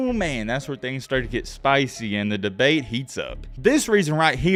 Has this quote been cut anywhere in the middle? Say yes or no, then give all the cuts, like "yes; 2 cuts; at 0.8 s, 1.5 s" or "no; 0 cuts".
no; 0 cuts